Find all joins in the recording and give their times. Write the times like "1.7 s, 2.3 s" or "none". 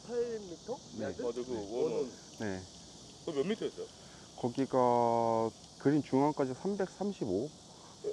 none